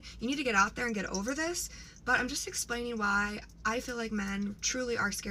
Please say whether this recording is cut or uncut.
uncut